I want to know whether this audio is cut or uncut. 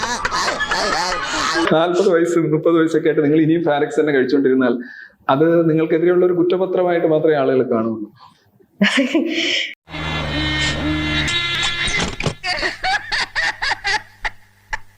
cut